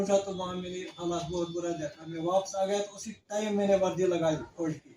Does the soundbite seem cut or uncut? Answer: uncut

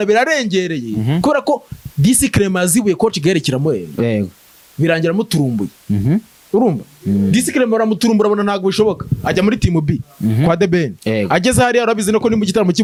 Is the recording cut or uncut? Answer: uncut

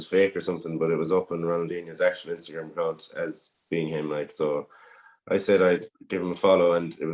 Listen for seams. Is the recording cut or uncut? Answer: uncut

